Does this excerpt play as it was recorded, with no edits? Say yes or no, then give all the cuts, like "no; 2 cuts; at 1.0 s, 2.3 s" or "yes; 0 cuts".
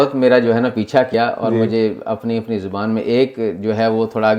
no; 1 cut; at 1.1 s